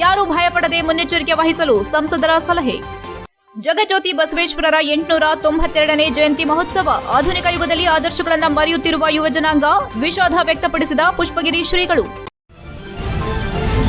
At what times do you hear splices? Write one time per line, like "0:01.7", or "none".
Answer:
0:12.2